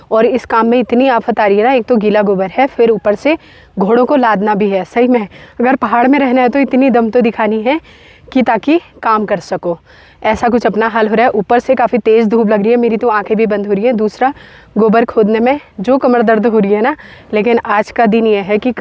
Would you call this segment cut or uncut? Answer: uncut